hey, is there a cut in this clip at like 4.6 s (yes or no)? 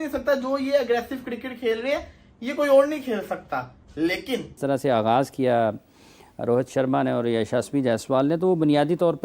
yes